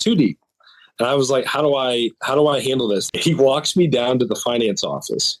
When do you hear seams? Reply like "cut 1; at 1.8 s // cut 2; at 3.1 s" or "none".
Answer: cut 1; at 3.1 s